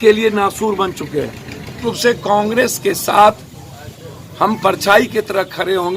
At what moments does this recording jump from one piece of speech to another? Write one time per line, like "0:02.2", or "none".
0:01.8